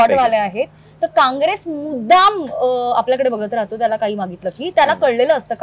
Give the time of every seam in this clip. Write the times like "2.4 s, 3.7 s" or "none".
none